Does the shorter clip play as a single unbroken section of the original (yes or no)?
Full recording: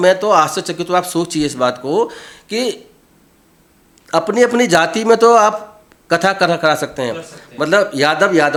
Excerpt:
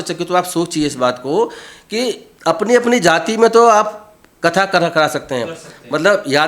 no